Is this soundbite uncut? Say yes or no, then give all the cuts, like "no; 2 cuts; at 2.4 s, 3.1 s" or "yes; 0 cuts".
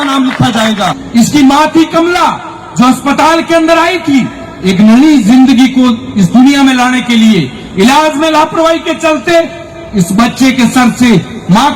no; 1 cut; at 0.9 s